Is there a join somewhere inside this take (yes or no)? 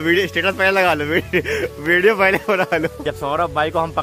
yes